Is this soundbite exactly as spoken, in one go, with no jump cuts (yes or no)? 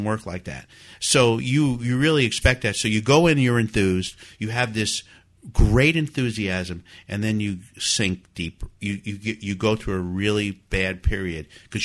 yes